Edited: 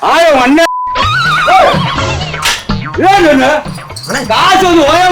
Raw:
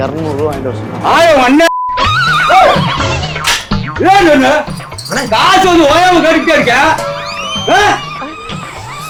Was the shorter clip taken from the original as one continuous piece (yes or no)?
yes